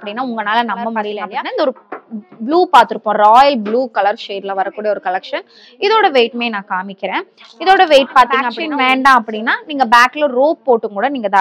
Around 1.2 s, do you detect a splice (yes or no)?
yes